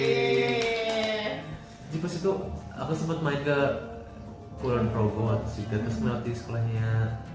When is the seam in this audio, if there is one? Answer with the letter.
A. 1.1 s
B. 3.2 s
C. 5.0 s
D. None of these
D